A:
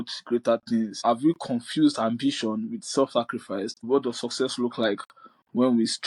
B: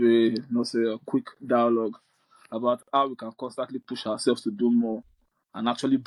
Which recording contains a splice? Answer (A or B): A